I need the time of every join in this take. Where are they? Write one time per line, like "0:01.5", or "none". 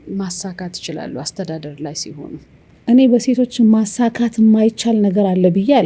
0:02.8